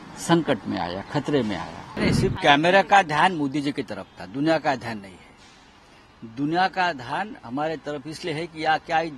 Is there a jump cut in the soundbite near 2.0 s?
yes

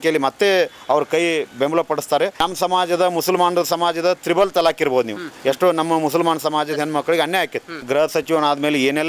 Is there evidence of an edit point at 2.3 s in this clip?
yes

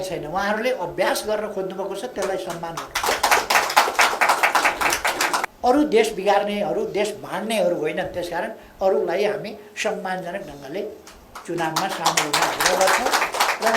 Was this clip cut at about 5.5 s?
yes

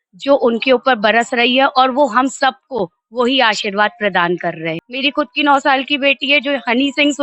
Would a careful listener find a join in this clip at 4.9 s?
yes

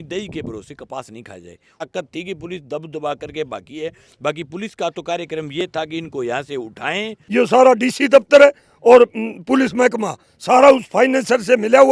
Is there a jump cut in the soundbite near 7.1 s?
yes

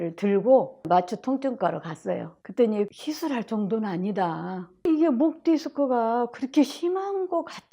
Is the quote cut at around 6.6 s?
no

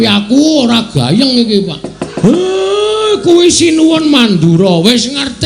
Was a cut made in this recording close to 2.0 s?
yes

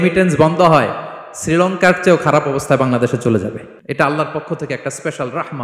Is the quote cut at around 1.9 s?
no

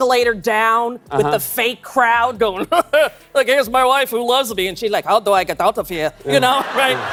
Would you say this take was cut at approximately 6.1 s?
no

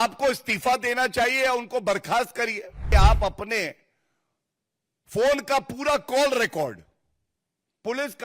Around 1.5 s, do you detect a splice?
no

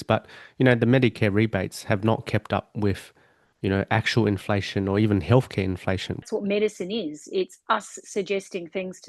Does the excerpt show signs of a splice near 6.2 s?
yes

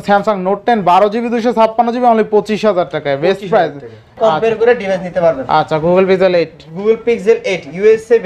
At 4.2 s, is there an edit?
yes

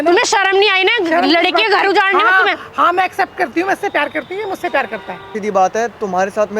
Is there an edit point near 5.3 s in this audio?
yes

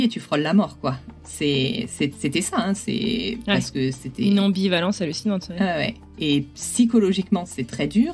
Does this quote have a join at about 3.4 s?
no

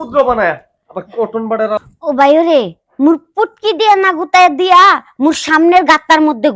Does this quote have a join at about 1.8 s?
yes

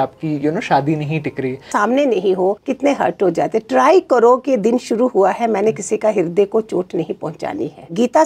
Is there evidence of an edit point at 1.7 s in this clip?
yes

